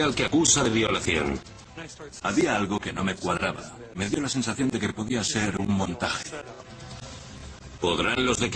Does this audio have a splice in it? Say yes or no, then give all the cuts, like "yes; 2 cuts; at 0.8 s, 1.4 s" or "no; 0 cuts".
no; 0 cuts